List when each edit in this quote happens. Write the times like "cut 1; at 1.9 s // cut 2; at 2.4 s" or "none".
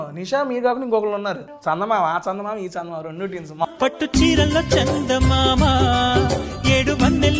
cut 1; at 1.5 s // cut 2; at 3.7 s